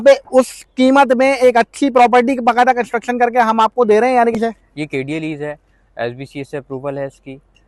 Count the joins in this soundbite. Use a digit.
1